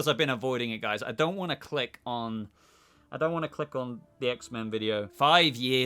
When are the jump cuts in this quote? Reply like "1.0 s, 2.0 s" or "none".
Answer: none